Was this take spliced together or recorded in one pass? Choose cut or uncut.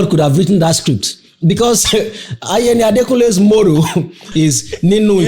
cut